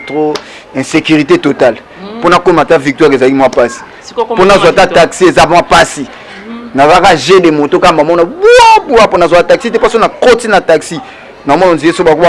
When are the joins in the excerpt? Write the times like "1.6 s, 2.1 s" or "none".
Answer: none